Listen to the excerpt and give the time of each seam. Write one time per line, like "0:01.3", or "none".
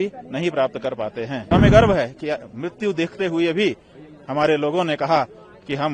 0:01.5